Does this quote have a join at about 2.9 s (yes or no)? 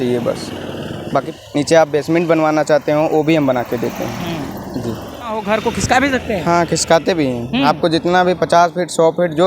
no